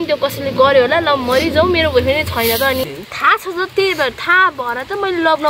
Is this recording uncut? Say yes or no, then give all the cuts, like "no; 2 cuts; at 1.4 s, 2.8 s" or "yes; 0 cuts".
no; 1 cut; at 2.8 s